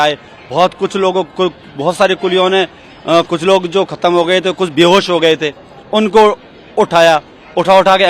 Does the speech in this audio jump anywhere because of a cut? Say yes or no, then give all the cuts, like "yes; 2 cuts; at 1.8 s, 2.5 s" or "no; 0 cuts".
no; 0 cuts